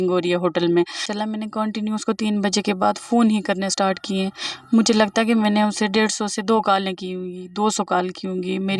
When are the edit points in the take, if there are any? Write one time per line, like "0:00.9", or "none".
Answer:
0:01.1